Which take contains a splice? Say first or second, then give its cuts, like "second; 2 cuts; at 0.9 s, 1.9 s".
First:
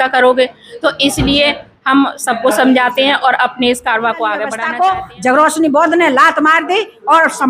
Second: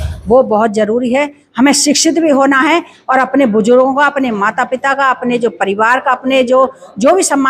first; 1 cut; at 4.6 s